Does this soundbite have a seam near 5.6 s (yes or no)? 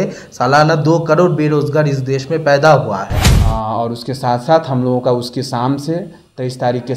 no